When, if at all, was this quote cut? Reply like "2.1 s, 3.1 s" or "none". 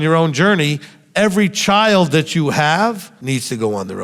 3.1 s

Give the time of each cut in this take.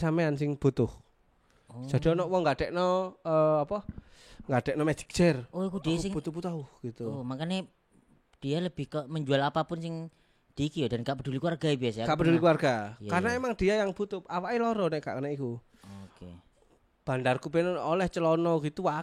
none

